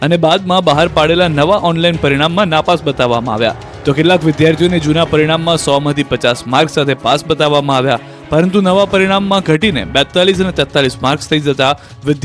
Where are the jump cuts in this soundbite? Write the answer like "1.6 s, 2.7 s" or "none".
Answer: 7.7 s